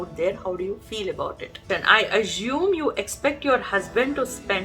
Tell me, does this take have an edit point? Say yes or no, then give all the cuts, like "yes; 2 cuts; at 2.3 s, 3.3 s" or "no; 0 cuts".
yes; 1 cut; at 1.7 s